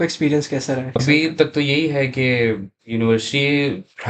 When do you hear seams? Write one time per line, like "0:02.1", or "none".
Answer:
0:01.0

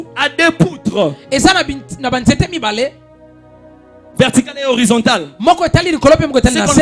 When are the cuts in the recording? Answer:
none

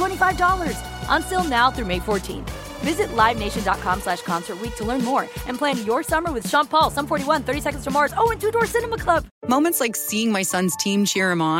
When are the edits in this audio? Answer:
0:09.3

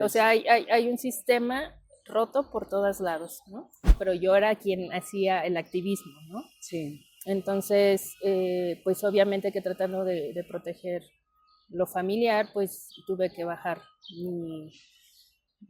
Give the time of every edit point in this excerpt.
0:04.0

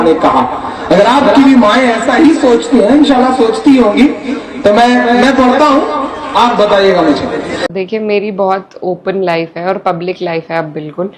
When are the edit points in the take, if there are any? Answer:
0:07.6

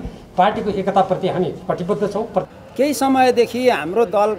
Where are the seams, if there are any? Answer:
0:02.5

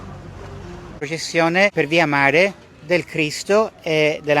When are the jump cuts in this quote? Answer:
0:01.0
0:01.7

